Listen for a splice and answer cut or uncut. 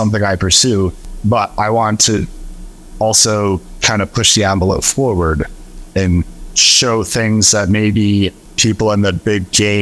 cut